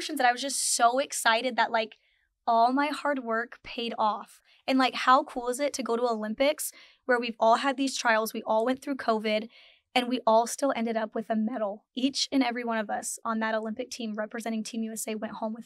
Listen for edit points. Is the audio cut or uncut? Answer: uncut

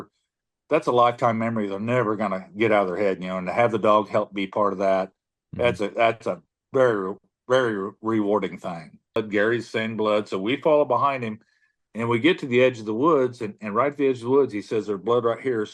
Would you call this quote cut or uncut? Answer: cut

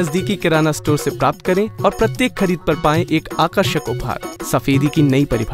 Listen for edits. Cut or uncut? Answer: cut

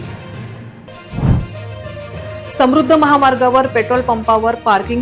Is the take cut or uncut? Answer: cut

